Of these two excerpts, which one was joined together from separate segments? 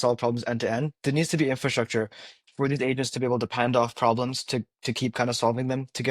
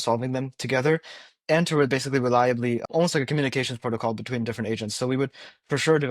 second; 1 cut; at 2.9 s

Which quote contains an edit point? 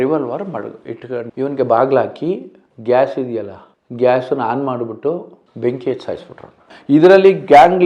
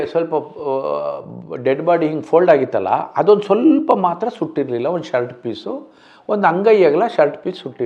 first; 2 cuts; at 1.3 s, 6.7 s

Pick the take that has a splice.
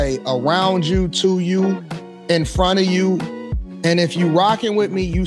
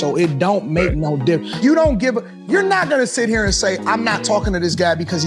second; 1 cut; at 1.5 s

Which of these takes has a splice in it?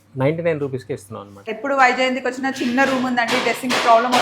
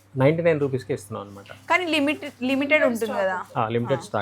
first; 1 cut; at 1.5 s

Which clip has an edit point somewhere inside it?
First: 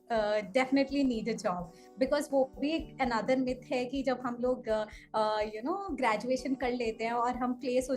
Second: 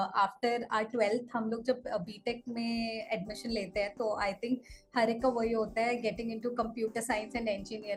first; 1 cut; at 1.8 s

